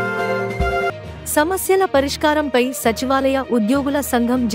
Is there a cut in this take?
yes; 1 cut; at 0.9 s

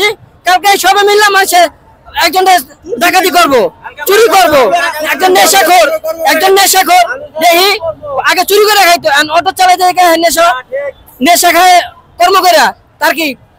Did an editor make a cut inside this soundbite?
no; 0 cuts

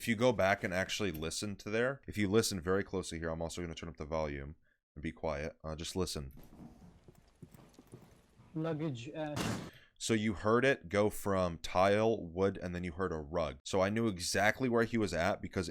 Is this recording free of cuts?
no; 2 cuts; at 2.0 s, 13.6 s

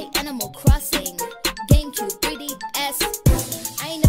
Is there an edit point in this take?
no; 0 cuts

